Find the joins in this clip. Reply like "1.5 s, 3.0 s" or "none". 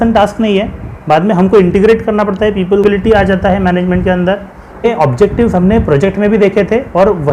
2.8 s, 4.8 s